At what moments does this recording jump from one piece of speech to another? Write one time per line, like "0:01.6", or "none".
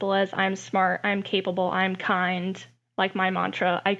none